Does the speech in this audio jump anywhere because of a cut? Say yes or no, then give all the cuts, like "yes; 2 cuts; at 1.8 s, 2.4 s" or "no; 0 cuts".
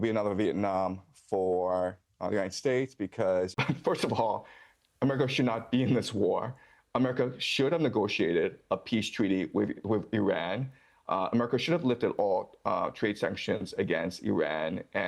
yes; 1 cut; at 3.6 s